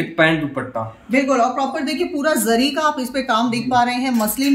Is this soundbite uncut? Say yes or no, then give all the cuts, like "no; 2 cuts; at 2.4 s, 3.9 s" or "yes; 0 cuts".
yes; 0 cuts